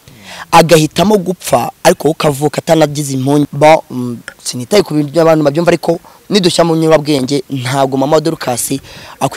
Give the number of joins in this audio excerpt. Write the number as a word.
one